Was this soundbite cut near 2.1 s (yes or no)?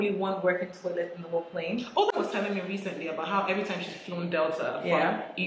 yes